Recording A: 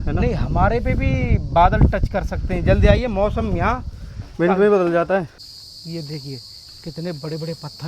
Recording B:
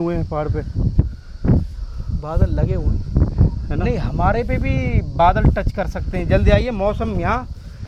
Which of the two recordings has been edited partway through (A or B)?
A